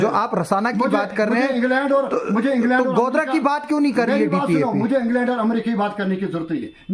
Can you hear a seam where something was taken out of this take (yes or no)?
no